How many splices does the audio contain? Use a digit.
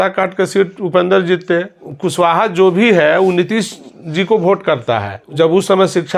2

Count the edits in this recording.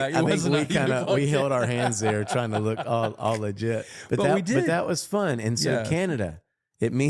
0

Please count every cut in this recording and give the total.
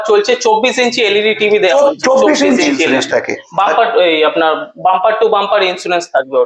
1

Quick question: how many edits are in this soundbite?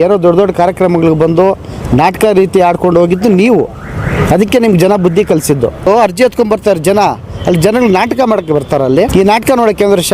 2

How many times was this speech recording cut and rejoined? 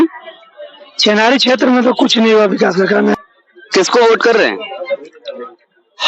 1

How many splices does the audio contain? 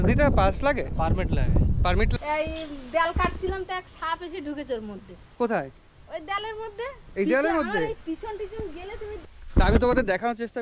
2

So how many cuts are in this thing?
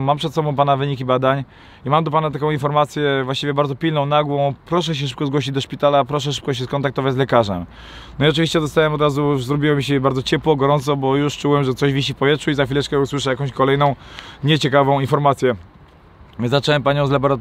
0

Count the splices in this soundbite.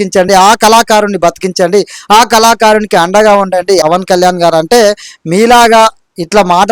1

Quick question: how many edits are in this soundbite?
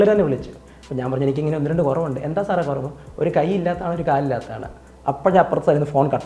0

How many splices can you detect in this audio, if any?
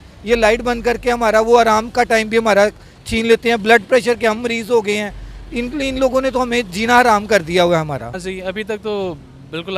1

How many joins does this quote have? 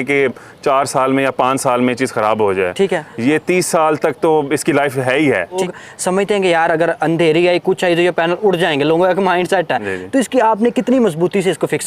1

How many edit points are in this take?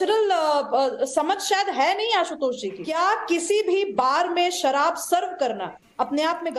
1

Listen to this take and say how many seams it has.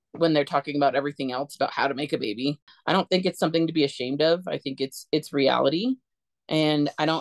1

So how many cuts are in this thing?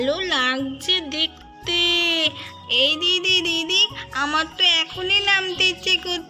1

